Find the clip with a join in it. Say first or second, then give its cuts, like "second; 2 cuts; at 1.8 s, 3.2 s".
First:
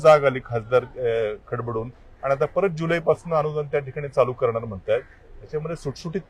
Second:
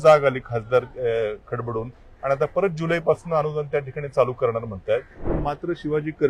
second; 1 cut; at 5.3 s